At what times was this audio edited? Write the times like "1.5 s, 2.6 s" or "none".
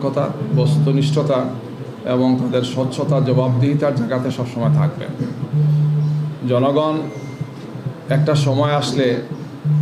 none